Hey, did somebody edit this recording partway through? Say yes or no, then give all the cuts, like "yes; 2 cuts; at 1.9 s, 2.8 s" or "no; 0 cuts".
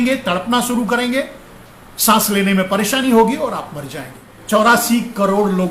yes; 1 cut; at 4.3 s